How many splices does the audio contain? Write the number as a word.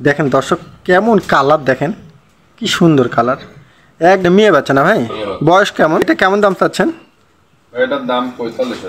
two